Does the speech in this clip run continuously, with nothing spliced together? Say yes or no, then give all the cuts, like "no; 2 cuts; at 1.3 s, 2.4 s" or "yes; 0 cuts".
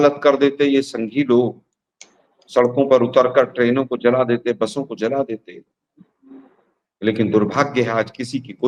yes; 0 cuts